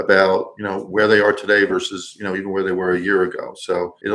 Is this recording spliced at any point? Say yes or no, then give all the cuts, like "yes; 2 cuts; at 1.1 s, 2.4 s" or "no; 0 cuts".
no; 0 cuts